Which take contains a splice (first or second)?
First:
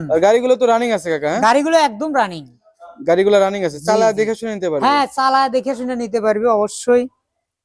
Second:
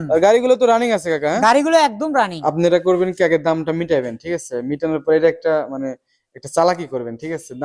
second